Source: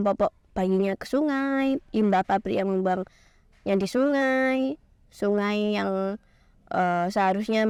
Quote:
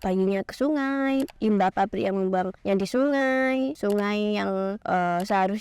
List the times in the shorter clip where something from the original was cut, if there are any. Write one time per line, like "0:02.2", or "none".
0:02.6
0:03.8
0:04.8